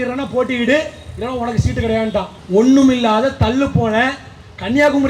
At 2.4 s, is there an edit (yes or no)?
yes